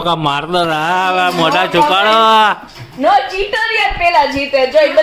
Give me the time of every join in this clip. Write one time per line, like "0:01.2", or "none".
none